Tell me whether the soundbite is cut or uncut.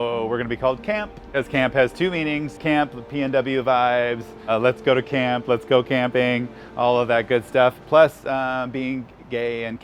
cut